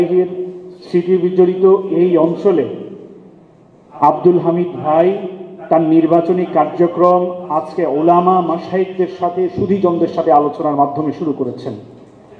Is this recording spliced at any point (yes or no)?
no